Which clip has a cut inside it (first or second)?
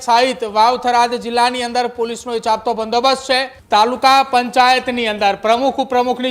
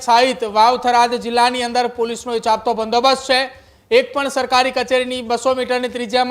first